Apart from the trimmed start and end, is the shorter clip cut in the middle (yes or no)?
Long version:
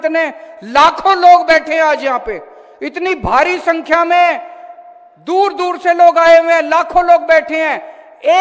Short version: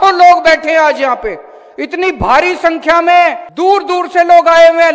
yes